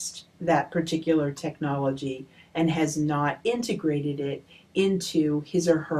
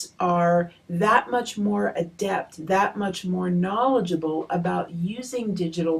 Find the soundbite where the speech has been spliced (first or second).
second